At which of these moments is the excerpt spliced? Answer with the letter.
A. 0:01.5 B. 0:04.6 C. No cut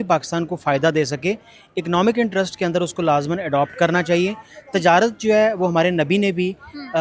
C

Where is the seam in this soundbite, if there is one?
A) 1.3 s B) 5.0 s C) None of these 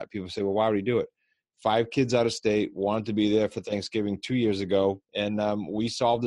B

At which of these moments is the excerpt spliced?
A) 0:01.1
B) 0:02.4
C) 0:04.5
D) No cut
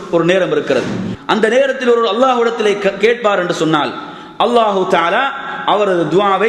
A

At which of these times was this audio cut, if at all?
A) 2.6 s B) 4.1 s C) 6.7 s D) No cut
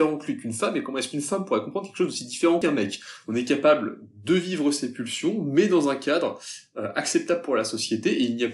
A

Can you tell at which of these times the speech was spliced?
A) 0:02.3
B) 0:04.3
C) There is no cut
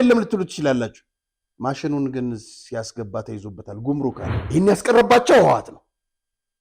B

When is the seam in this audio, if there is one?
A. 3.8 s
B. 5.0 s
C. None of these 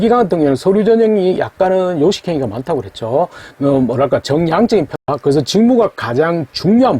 B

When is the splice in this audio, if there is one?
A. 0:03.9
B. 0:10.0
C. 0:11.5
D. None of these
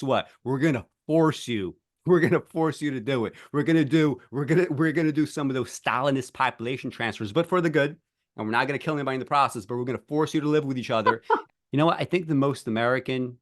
C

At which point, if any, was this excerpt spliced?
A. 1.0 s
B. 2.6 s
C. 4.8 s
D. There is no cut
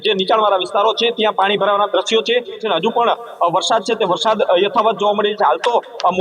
B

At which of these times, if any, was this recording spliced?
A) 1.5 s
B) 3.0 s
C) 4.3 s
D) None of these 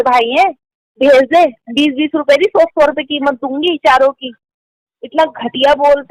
C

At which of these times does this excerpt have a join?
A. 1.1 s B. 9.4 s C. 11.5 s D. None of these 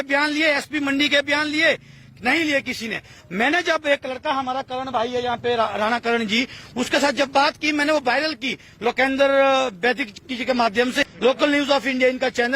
C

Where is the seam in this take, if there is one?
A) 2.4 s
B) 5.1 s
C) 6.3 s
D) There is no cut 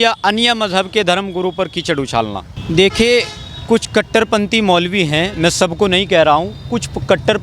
A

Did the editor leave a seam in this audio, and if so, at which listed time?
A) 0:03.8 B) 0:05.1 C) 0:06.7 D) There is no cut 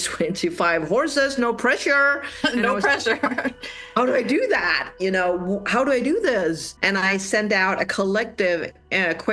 C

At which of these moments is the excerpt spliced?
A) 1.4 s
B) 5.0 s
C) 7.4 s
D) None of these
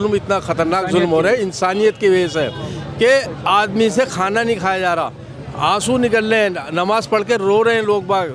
D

